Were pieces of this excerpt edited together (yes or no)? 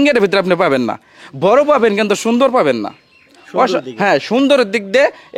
no